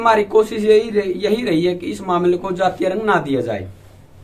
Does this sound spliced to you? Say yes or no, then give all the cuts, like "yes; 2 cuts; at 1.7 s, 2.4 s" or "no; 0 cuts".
no; 0 cuts